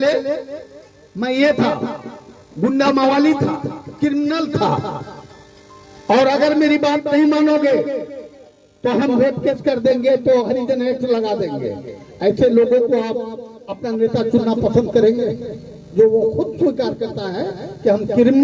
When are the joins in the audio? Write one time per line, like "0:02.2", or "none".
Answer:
none